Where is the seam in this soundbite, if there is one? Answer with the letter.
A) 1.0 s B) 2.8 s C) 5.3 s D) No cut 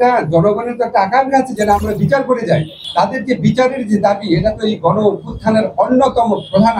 B